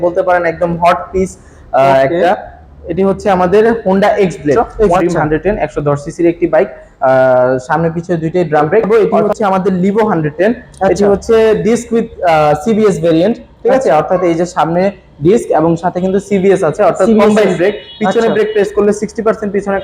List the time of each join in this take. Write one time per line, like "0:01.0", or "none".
0:05.0
0:08.9